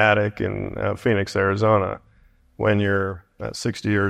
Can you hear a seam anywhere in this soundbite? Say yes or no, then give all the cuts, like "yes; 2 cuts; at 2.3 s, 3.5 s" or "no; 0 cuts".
no; 0 cuts